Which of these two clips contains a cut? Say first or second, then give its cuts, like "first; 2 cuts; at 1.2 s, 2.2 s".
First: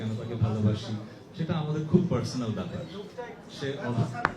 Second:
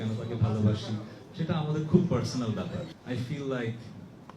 second; 1 cut; at 2.9 s